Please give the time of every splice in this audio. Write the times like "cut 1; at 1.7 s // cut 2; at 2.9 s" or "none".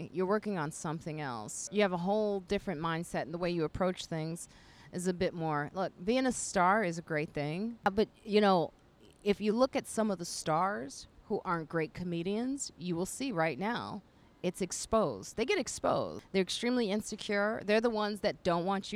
cut 1; at 1.7 s // cut 2; at 7.9 s // cut 3; at 16.2 s